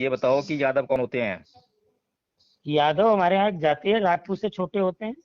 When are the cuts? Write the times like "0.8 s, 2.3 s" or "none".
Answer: 0.9 s

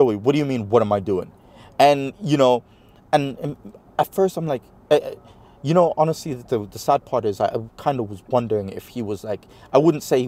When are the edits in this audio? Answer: none

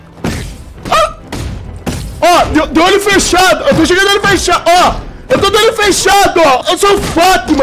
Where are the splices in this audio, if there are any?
1.7 s, 6.6 s

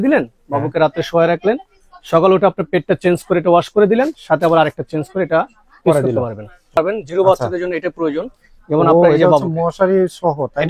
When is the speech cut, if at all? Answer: 6.8 s

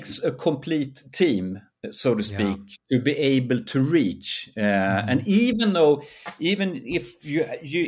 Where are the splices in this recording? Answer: none

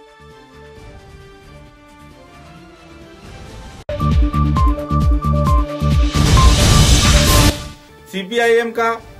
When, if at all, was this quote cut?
7.5 s

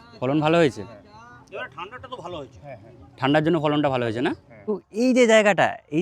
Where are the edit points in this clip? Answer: 4.7 s

